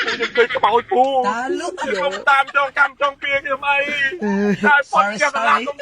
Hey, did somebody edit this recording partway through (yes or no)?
yes